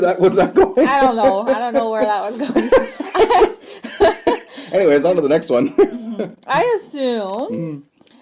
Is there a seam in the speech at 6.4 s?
no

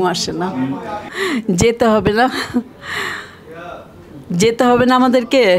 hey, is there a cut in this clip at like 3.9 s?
no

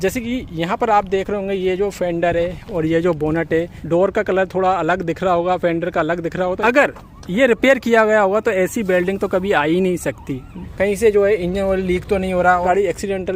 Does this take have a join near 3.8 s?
yes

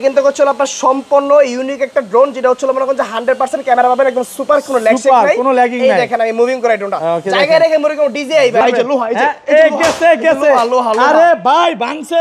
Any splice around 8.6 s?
yes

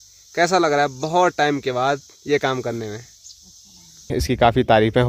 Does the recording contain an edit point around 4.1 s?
yes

